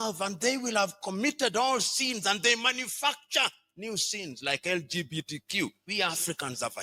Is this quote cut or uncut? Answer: cut